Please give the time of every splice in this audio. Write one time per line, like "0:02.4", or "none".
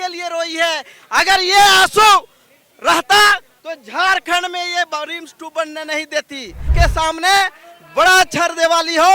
0:06.7